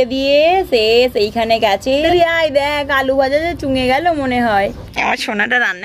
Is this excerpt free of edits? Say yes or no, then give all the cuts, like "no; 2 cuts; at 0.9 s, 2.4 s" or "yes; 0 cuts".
no; 2 cuts; at 2.0 s, 4.8 s